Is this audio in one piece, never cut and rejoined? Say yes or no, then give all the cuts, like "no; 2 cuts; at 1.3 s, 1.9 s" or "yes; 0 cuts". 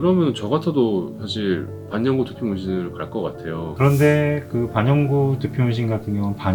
yes; 0 cuts